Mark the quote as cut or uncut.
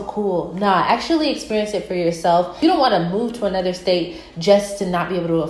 cut